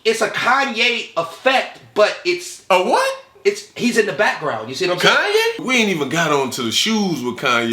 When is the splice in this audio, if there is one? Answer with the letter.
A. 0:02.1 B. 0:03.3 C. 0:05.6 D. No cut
C